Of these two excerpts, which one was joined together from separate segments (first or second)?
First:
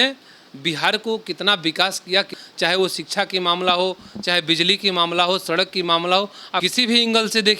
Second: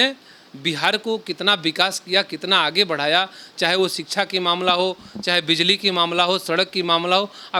first